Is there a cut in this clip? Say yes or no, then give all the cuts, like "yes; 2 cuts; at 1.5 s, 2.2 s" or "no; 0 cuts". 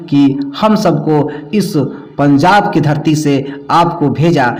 no; 0 cuts